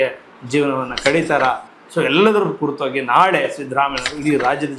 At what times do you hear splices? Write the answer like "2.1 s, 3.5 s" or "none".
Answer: none

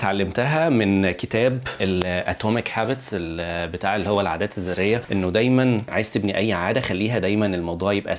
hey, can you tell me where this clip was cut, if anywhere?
1.7 s

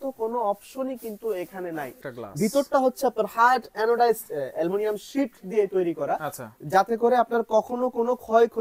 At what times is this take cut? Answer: 2.0 s

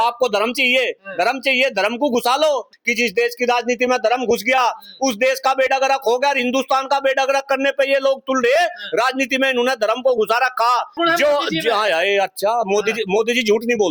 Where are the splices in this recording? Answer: 2.7 s, 11.0 s

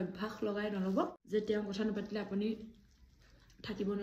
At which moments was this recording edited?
1.2 s

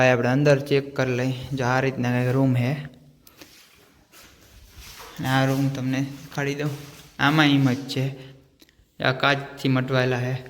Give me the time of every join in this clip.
4.2 s

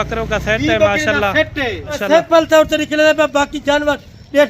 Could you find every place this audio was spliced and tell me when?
2.0 s

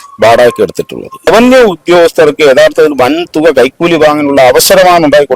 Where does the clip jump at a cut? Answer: 1.3 s

